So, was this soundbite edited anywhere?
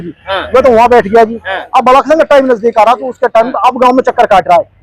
no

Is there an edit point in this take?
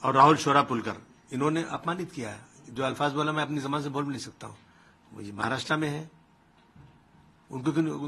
no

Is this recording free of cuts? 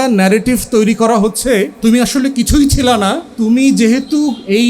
no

